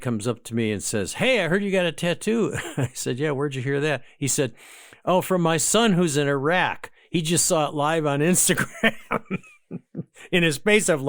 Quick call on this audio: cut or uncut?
uncut